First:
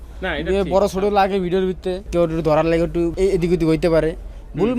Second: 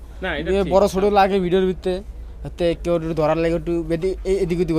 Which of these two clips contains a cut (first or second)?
first